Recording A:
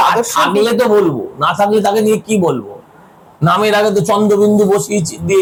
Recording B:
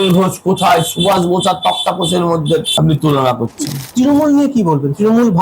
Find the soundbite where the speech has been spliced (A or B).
B